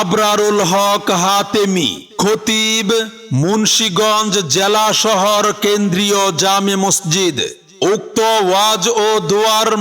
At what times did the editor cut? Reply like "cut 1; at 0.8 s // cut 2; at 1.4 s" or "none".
cut 1; at 7.6 s